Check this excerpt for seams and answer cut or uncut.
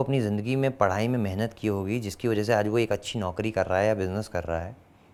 uncut